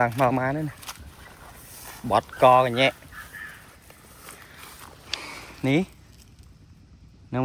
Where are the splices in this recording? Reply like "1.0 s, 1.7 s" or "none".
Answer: none